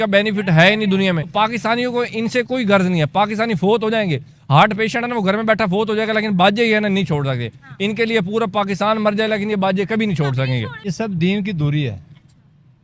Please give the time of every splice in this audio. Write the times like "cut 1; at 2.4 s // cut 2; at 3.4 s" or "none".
cut 1; at 1.3 s // cut 2; at 10.8 s